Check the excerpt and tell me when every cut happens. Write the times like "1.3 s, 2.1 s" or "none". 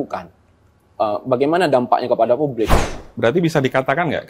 2.8 s